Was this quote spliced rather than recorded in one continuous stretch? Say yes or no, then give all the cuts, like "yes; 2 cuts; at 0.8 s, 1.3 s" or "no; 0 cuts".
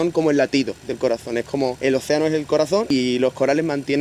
yes; 2 cuts; at 1.8 s, 2.9 s